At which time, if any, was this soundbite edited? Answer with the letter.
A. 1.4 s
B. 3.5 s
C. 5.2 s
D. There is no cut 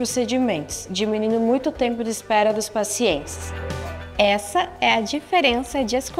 D